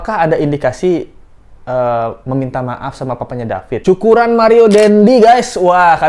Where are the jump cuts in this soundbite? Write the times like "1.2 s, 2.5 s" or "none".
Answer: 3.8 s